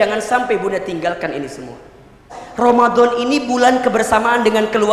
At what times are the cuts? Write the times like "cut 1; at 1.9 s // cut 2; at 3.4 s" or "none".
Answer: cut 1; at 2.4 s